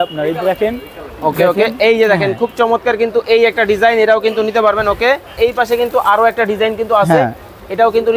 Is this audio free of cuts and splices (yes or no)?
no